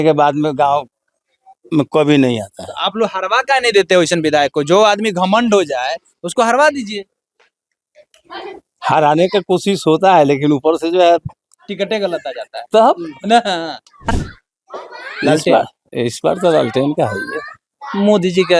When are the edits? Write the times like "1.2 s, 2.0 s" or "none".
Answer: 14.1 s